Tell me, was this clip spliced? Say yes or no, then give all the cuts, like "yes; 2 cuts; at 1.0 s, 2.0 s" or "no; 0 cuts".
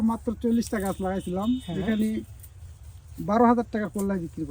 no; 0 cuts